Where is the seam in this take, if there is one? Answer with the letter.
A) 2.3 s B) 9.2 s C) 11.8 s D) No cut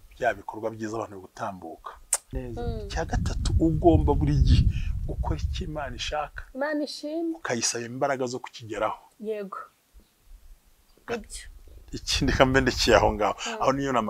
A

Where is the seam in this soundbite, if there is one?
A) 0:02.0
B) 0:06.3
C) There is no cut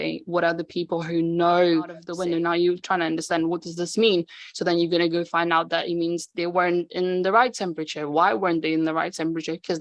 A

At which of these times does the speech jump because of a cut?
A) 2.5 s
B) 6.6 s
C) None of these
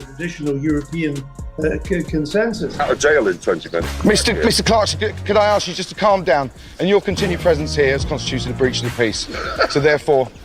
A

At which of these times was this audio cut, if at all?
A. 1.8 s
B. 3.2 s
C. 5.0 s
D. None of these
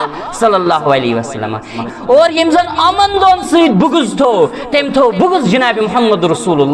A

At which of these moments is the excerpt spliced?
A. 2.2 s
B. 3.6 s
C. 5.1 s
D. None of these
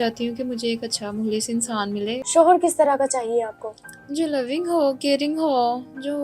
A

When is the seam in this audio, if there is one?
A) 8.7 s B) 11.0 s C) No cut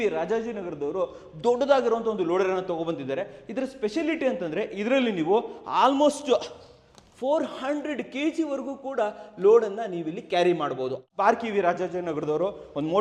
B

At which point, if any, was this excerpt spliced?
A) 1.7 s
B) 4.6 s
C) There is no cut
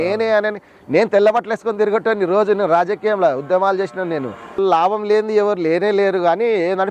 B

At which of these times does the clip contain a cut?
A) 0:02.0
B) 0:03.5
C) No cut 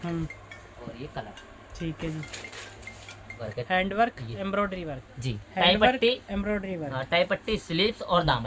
B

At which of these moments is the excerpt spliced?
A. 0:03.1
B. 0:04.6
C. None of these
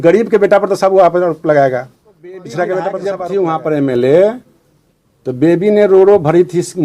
A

